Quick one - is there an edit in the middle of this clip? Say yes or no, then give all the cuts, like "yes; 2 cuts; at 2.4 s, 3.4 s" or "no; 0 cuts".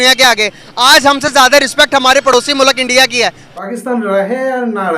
yes; 1 cut; at 3.4 s